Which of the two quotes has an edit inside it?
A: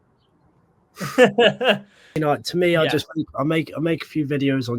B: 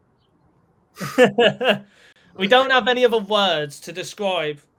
A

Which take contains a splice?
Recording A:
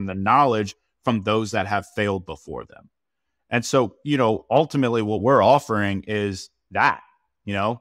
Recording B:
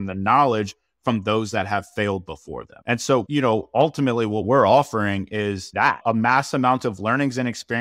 B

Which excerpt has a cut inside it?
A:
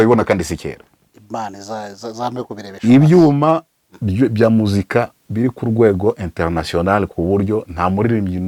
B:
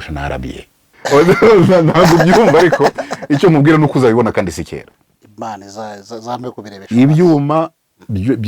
B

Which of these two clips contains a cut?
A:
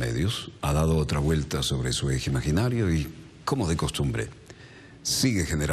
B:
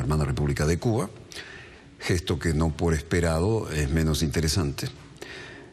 A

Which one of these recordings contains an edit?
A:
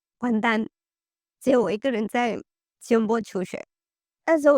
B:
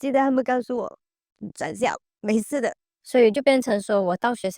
B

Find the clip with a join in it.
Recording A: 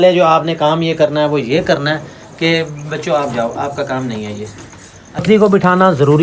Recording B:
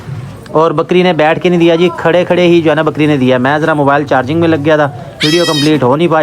A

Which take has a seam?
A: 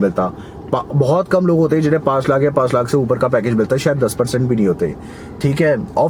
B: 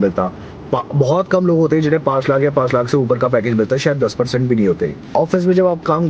B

